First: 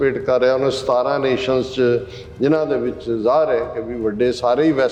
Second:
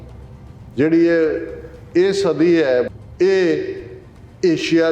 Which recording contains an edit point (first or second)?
second